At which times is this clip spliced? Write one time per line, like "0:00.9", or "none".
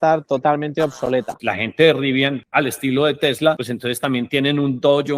0:01.0
0:02.4
0:03.7